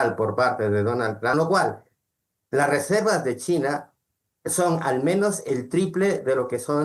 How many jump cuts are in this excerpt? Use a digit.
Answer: 1